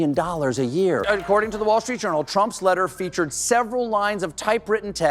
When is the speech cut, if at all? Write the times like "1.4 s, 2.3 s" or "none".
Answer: 1.0 s